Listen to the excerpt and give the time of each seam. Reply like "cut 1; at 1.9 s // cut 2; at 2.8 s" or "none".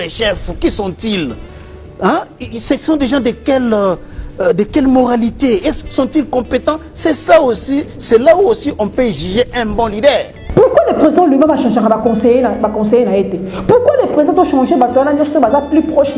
cut 1; at 10.3 s